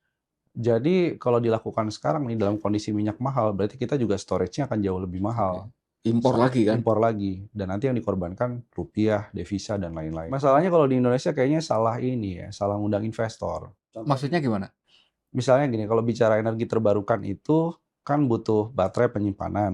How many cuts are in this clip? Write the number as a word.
one